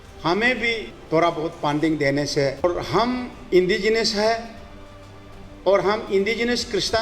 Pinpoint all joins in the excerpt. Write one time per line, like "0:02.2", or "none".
0:00.9
0:02.6